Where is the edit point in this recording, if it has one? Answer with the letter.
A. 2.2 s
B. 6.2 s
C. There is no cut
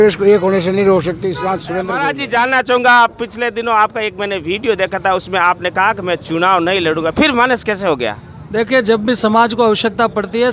A